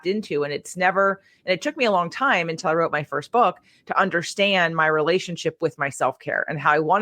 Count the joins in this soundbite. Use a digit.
0